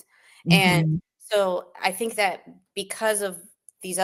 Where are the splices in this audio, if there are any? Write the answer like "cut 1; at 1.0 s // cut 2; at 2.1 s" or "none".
none